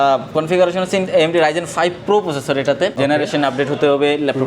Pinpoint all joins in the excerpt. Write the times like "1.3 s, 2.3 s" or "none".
2.9 s